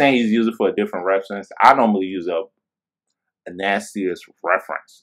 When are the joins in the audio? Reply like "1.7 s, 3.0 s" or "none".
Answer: none